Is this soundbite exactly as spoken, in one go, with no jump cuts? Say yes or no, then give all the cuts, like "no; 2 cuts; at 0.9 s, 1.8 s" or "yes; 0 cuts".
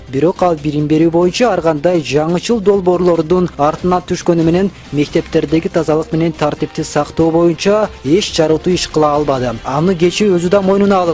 yes; 0 cuts